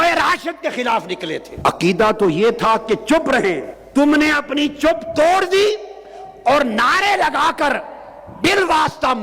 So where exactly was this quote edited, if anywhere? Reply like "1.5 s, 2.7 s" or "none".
1.5 s, 3.7 s